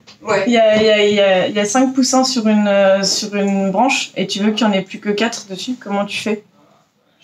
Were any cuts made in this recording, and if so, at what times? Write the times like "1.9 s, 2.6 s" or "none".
none